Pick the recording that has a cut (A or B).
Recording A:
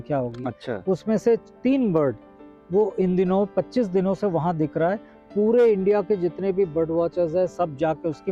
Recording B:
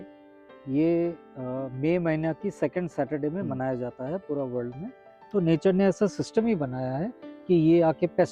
B